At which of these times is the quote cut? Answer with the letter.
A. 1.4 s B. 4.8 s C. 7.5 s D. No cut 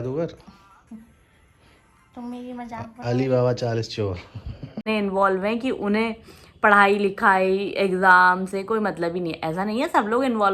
B